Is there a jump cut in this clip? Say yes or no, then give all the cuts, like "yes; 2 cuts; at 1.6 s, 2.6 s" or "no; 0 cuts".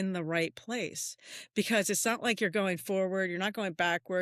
no; 0 cuts